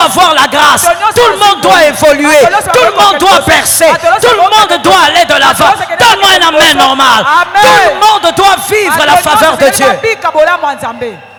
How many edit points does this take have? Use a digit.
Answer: 0